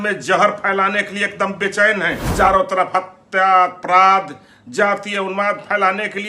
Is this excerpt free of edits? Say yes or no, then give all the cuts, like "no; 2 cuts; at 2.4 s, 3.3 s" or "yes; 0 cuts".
no; 1 cut; at 2.2 s